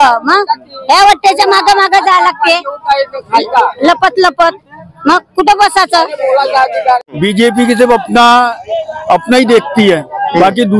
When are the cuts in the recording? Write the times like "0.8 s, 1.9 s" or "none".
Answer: 7.2 s